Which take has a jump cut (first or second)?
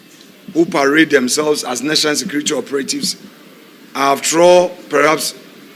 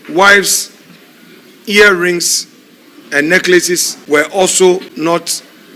second